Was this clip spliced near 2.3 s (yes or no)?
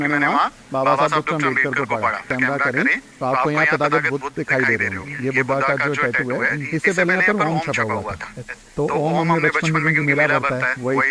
yes